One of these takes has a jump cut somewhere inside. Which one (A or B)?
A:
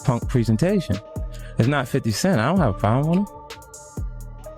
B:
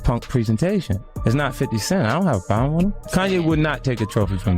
B